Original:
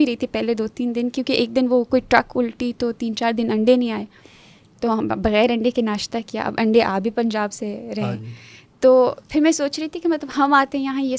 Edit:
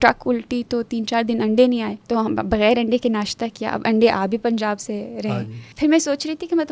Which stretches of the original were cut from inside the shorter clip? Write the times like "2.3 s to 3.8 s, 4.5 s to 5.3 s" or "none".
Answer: 4.0 s to 4.7 s, 8.4 s to 9.2 s